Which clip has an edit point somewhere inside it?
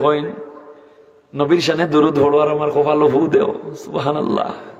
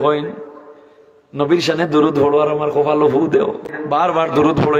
second; 1 cut; at 3.8 s

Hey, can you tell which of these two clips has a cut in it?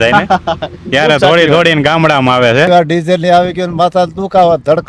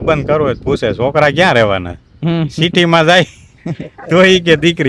first; 1 cut; at 2.7 s

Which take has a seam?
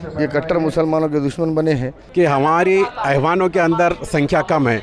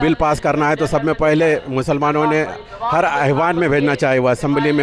first; 1 cut; at 2.0 s

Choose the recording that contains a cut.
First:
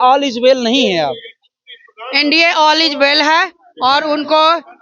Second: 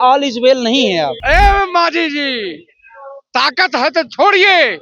second; 1 cut; at 1.2 s

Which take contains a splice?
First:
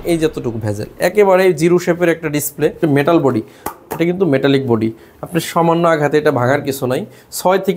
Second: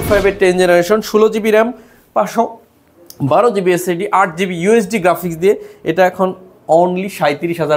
first; 1 cut; at 2.8 s

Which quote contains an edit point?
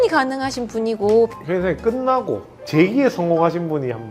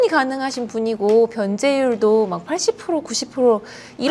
first; 2 cuts; at 1.3 s, 2.7 s

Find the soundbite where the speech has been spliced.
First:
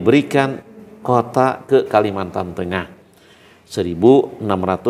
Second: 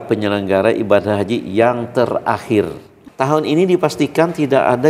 second; 1 cut; at 3.0 s

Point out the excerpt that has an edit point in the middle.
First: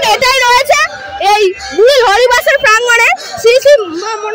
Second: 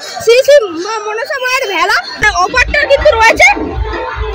second; 1 cut; at 2.2 s

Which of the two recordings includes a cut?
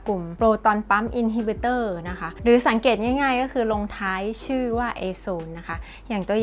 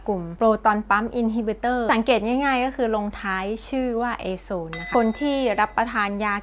second; 2 cuts; at 1.9 s, 4.9 s

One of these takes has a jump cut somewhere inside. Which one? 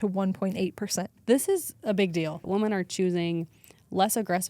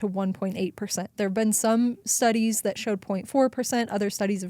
first; 2 cuts; at 1.1 s, 2.4 s

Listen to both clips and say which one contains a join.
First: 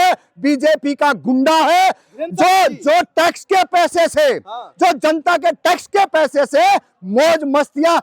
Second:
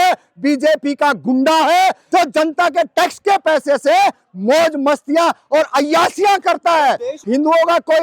second; 2 cuts; at 2.0 s, 7.1 s

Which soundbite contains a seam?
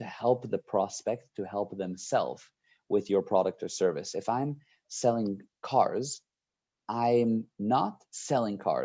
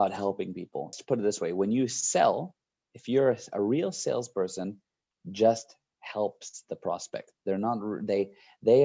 second; 1 cut; at 0.9 s

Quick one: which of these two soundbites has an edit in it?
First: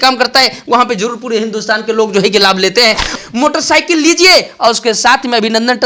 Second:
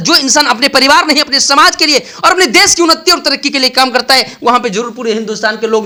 first; 1 cut; at 3.2 s

